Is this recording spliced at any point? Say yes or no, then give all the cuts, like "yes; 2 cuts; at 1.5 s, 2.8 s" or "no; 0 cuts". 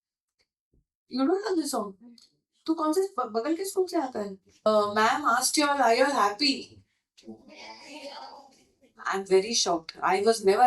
yes; 1 cut; at 4.7 s